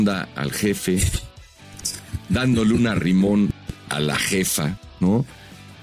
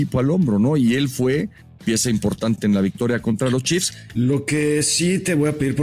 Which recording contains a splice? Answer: second; 1 cut; at 4.0 s

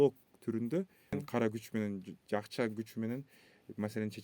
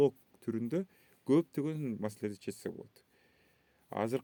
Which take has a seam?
first; 1 cut; at 1.2 s

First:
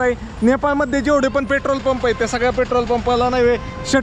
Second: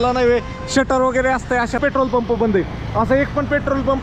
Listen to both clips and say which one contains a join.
second; 1 cut; at 1.8 s

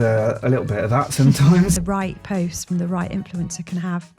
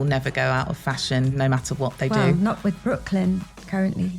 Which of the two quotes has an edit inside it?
first; 1 cut; at 1.8 s

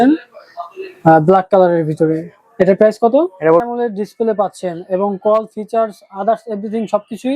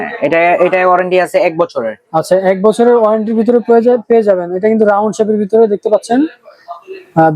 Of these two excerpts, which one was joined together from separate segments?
first; 1 cut; at 3.6 s

